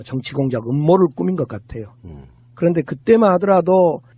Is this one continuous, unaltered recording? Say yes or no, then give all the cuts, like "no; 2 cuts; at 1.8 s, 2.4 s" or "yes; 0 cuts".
no; 1 cut; at 2.2 s